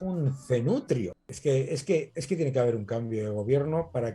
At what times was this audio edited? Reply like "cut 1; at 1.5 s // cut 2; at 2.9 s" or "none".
cut 1; at 1.2 s